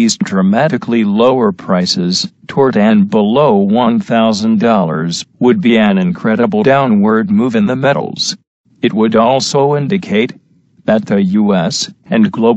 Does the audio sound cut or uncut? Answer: cut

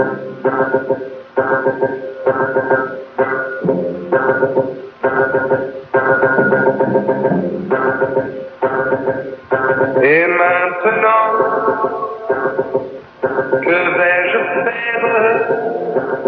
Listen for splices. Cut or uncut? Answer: uncut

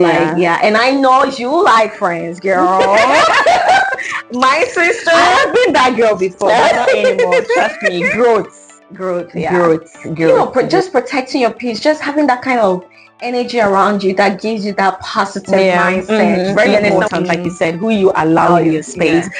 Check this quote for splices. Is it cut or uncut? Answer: cut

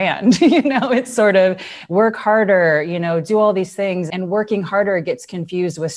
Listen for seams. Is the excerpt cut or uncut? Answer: cut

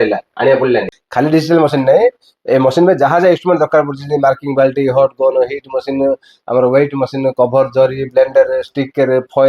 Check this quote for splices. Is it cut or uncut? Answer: cut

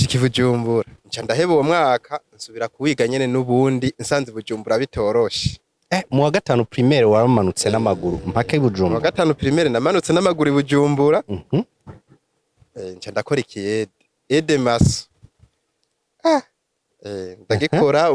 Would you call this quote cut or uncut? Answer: cut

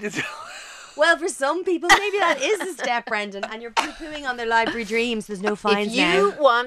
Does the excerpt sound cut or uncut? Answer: uncut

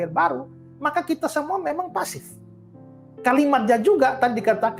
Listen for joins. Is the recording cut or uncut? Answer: uncut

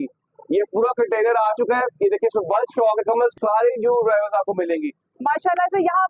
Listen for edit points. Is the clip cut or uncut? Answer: cut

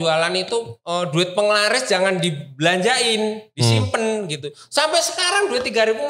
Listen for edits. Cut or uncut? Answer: uncut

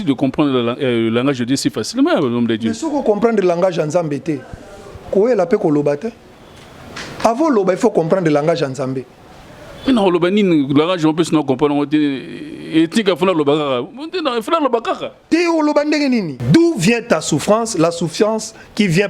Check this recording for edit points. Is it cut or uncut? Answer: cut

